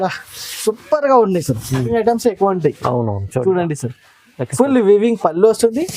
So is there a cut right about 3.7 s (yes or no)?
no